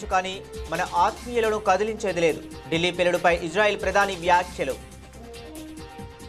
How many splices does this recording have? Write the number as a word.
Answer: one